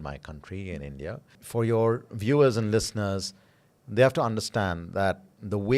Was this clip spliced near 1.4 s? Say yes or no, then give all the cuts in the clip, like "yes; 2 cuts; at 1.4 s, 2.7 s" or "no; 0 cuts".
yes; 1 cut; at 1.4 s